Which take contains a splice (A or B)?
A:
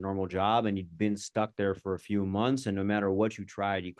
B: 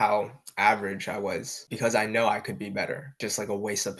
B